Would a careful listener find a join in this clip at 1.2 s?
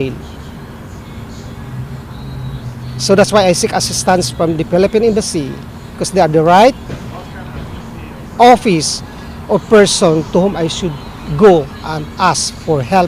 yes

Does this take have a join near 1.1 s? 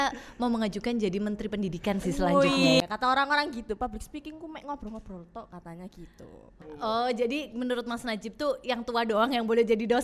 no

